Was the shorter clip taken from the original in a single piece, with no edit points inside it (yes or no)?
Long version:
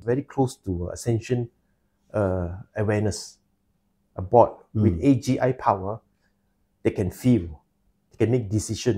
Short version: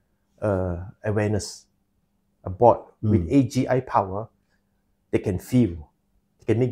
yes